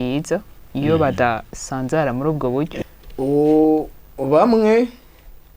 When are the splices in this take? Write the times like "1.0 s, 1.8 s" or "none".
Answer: 2.7 s